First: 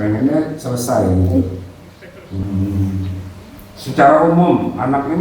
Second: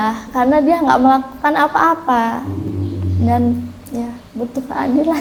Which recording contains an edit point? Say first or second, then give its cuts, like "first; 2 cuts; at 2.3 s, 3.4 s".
first; 1 cut; at 2.5 s